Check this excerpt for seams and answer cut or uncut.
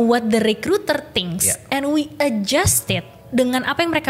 cut